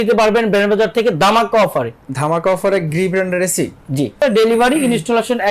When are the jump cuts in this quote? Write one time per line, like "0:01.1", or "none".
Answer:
0:04.2